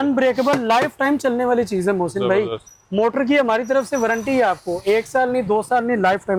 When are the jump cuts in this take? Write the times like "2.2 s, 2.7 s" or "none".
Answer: none